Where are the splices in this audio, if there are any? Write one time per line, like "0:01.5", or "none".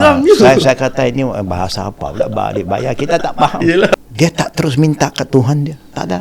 0:03.9